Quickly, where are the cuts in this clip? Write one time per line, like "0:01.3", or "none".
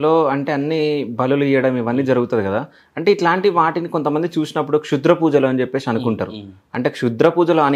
none